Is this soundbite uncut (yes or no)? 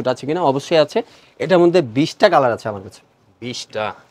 yes